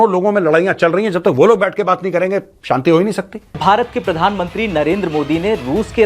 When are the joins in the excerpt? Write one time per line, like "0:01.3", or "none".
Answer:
0:03.6

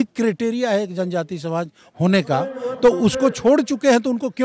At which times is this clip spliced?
none

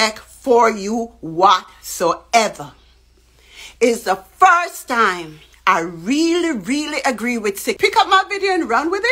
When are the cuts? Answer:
0:07.8

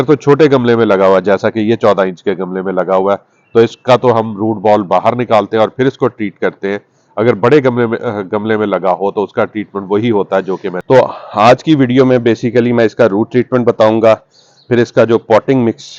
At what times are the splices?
0:10.8

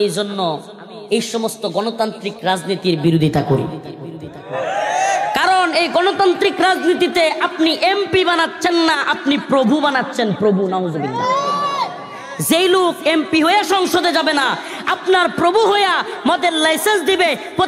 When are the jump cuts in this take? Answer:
none

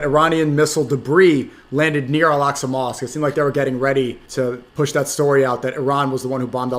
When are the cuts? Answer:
0:04.4

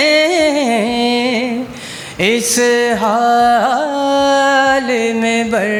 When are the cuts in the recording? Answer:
none

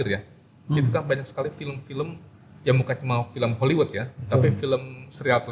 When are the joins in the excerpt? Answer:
none

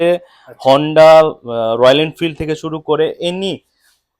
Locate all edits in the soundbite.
none

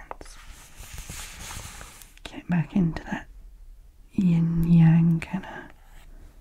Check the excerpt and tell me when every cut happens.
0:02.0

